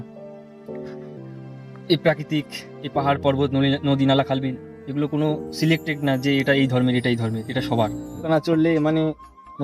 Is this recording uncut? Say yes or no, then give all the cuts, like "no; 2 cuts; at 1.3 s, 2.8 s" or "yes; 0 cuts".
no; 1 cut; at 8.3 s